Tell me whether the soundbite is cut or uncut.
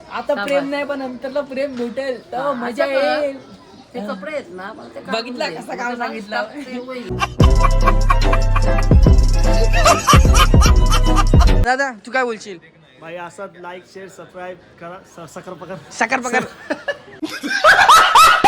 cut